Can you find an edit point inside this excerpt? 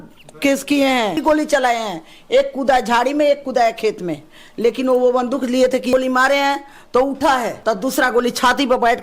yes; 3 cuts; at 1.2 s, 5.9 s, 7.5 s

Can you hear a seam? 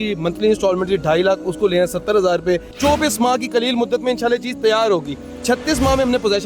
yes; 1 cut; at 2.7 s

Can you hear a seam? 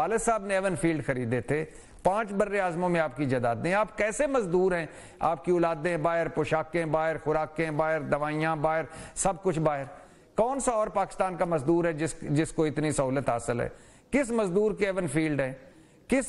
no; 0 cuts

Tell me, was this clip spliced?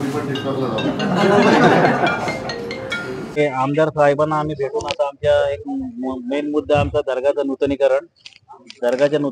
yes; 1 cut; at 3.4 s

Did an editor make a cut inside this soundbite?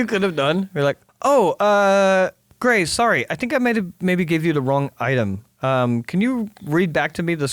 yes; 2 cuts; at 1.1 s, 2.5 s

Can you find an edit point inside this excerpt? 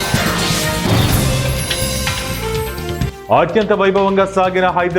yes; 1 cut; at 3.1 s

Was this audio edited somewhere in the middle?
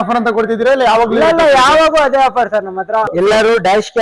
yes; 1 cut; at 3.1 s

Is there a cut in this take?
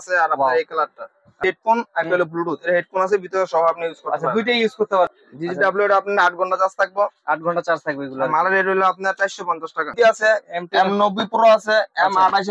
yes; 3 cuts; at 1.3 s, 5.1 s, 9.9 s

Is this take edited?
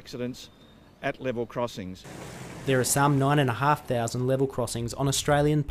no; 0 cuts

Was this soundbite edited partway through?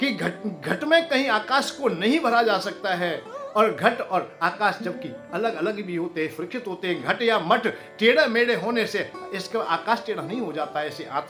no; 0 cuts

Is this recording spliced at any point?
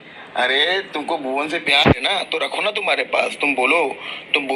no; 0 cuts

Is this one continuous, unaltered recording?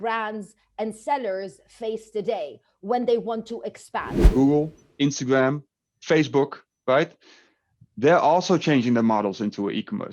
no; 1 cut; at 4.1 s

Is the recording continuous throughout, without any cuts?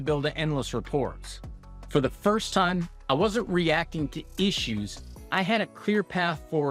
yes; 0 cuts

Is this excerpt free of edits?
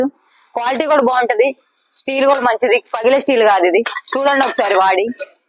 yes; 0 cuts

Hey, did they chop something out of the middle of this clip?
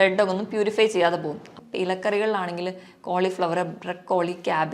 yes; 1 cut; at 1.5 s

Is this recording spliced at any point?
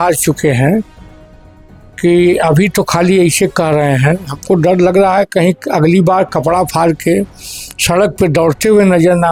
no; 0 cuts

